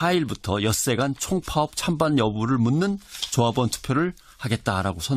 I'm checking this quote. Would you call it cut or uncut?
uncut